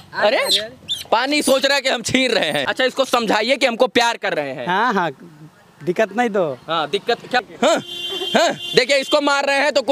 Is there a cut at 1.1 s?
no; 2 cuts; at 2.7 s, 7.4 s

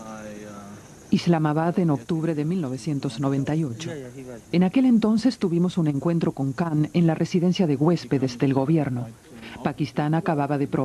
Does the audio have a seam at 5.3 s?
no; 0 cuts

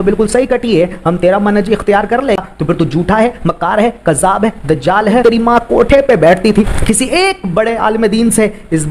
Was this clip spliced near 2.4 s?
yes; 3 cuts; at 2.4 s, 5.2 s, 6.7 s

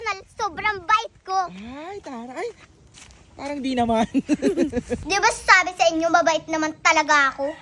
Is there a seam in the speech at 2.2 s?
no; 1 cut; at 5.0 s

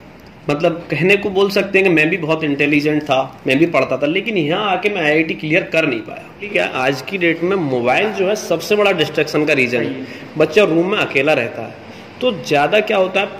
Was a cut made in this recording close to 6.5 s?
yes; 1 cut; at 6.5 s

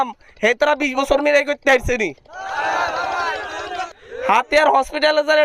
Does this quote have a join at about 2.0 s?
no; 1 cut; at 4.0 s

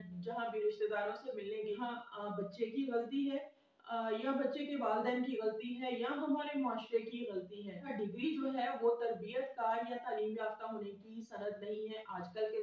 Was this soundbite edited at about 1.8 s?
yes; 2 cuts; at 1.8 s, 7.8 s

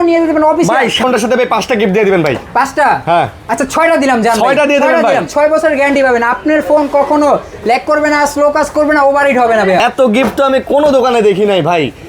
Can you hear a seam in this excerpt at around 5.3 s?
yes; 3 cuts; at 1.0 s, 5.3 s, 9.8 s

